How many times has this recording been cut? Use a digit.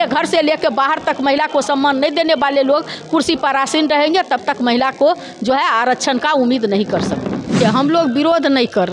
1